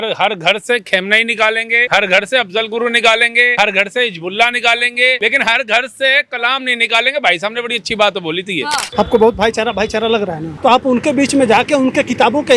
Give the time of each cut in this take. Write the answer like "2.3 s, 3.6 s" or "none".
1.8 s, 3.5 s, 5.2 s, 8.8 s, 10.5 s